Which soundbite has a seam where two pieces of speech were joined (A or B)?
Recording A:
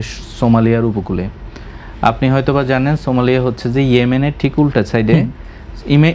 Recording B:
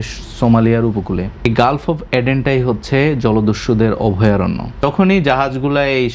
B